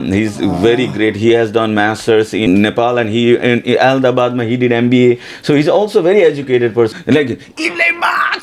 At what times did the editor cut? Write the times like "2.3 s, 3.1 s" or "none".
2.5 s, 6.9 s